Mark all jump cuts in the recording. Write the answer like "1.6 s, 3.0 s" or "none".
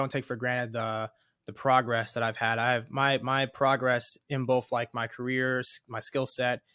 none